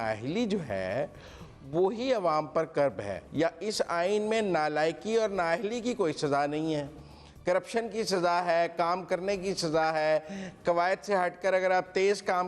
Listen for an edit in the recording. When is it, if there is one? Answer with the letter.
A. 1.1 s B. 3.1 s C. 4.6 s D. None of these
B